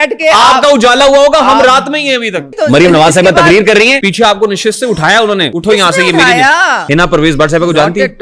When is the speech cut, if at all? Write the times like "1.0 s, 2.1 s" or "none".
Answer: 2.5 s, 4.0 s, 5.5 s, 6.8 s